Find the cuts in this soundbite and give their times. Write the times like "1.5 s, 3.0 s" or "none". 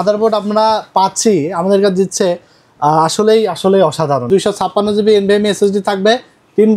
4.3 s